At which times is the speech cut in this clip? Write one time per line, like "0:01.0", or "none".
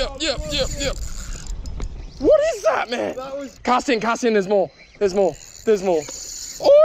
0:03.5